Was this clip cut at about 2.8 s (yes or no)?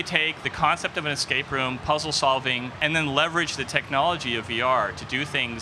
yes